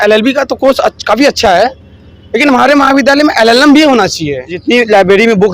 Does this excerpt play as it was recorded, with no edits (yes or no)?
no